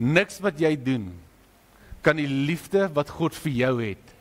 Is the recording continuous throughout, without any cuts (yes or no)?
yes